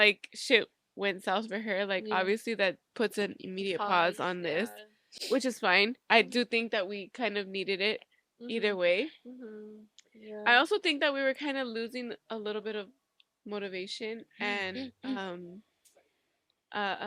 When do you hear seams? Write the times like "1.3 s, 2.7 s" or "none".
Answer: none